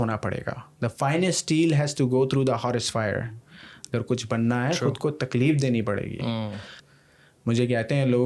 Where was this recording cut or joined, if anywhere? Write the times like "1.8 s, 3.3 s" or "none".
6.7 s

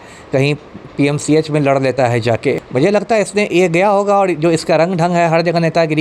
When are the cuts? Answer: 2.6 s

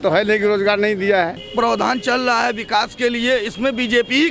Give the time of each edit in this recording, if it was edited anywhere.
1.4 s

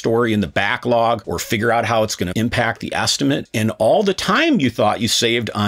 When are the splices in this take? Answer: 2.3 s, 3.4 s

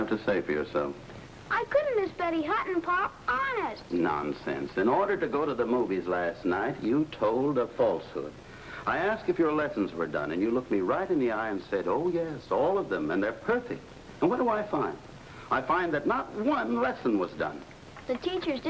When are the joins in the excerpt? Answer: 7.6 s

